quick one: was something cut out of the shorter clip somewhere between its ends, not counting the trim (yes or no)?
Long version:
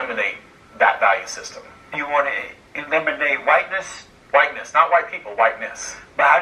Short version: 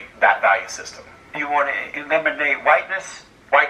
yes